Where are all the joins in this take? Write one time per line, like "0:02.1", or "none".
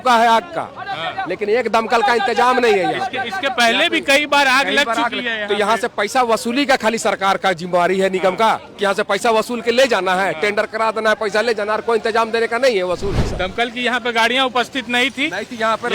0:13.3